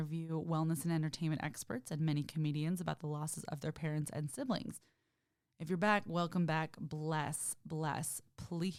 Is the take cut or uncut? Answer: uncut